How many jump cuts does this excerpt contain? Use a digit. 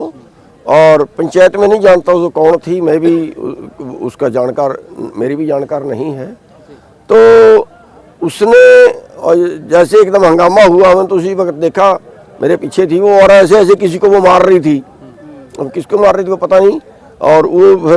0